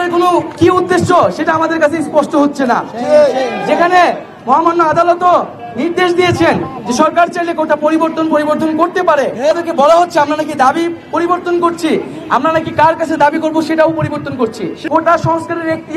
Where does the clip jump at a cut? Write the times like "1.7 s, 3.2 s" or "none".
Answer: 9.5 s, 14.7 s